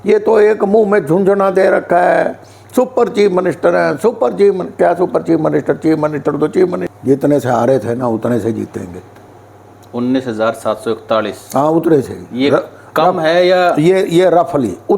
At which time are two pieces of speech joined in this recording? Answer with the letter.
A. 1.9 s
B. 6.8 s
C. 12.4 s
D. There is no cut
B